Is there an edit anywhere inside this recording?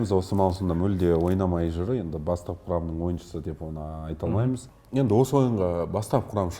no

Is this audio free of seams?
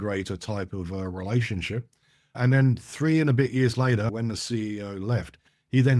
no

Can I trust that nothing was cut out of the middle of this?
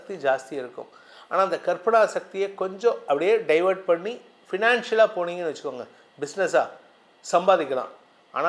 yes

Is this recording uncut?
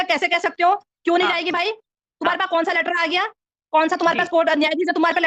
yes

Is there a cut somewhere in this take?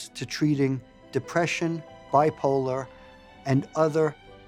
no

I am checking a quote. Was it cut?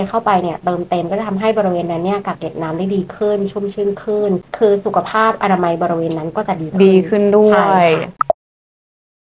no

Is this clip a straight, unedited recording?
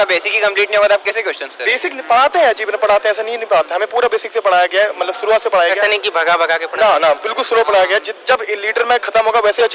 yes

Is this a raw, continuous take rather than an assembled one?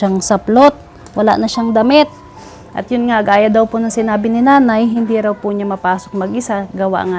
yes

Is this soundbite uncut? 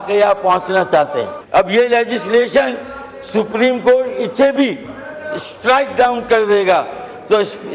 no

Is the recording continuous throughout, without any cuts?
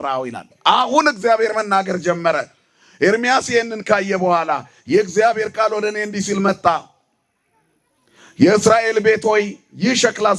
yes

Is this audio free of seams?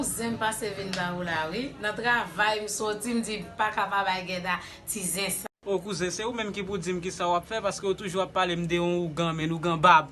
no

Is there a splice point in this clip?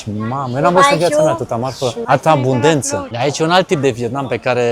yes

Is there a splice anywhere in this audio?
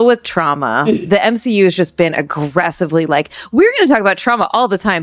yes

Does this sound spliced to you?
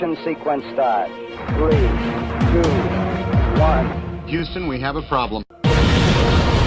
no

